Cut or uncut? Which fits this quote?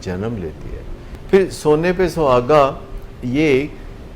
cut